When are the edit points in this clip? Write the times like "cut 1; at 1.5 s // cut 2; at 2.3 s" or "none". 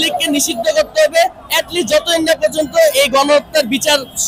none